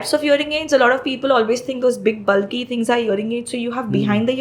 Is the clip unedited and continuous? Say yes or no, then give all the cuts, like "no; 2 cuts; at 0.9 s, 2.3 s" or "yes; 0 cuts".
yes; 0 cuts